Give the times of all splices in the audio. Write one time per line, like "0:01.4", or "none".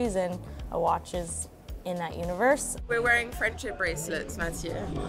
0:02.9